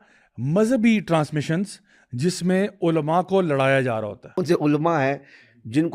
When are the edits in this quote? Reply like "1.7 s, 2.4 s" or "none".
4.4 s